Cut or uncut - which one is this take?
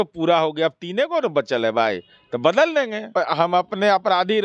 cut